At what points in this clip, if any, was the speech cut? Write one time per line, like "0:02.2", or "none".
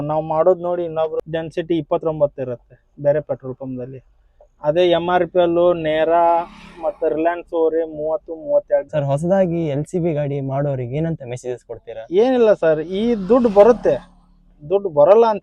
0:01.2
0:08.9